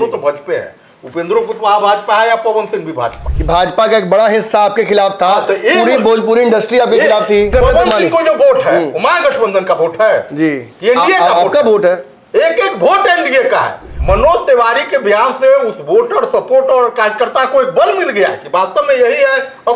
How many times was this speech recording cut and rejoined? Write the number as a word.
three